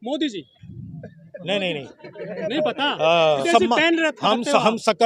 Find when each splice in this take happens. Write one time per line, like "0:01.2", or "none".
0:03.4